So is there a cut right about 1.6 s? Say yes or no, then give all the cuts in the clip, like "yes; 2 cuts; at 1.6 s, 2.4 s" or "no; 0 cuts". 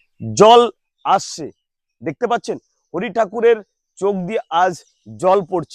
no; 0 cuts